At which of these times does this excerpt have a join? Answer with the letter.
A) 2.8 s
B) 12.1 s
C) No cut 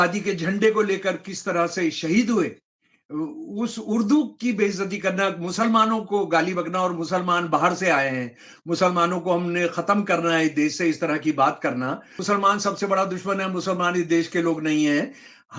B